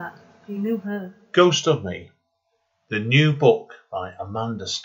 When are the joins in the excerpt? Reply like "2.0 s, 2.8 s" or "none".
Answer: none